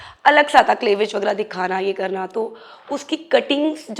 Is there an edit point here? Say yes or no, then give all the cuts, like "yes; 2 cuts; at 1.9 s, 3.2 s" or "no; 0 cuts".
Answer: no; 0 cuts